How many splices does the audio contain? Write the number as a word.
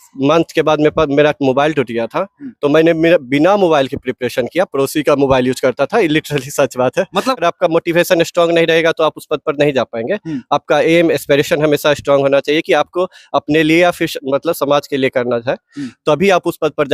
one